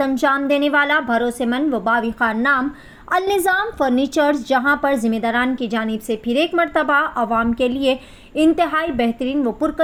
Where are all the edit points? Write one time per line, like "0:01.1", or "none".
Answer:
none